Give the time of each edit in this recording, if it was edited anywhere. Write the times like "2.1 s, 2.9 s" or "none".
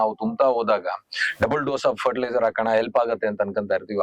none